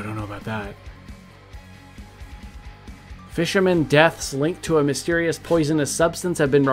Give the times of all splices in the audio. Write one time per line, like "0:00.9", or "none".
none